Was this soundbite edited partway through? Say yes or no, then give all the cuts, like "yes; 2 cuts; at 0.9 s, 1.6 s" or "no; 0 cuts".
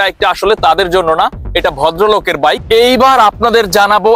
yes; 1 cut; at 2.6 s